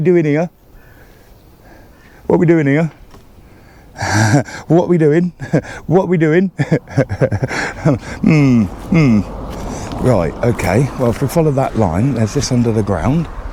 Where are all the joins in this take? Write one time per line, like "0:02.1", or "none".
none